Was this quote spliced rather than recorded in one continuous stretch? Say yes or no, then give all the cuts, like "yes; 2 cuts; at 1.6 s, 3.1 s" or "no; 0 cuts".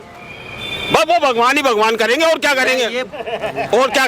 no; 0 cuts